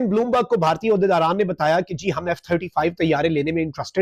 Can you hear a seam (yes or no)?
no